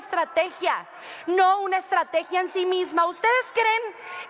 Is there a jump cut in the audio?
no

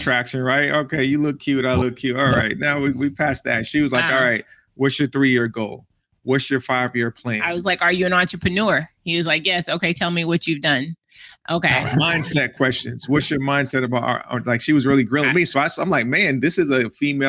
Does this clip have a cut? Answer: no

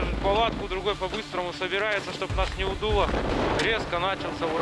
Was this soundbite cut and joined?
yes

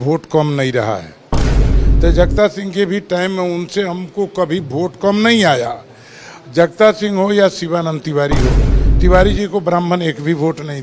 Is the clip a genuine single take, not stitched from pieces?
no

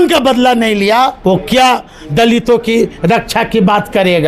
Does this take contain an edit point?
yes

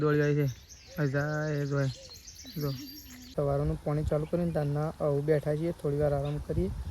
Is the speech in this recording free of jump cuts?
no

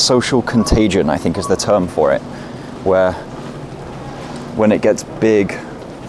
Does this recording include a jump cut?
no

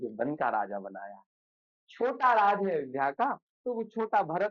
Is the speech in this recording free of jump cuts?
yes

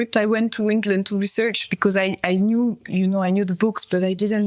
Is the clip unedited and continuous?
yes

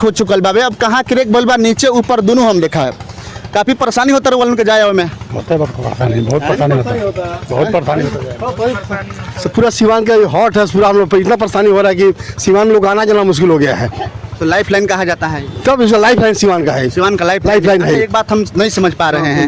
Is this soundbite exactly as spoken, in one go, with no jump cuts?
yes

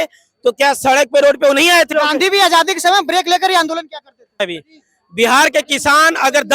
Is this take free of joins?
no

